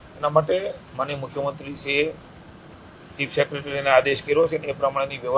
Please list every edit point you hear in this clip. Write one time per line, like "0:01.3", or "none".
none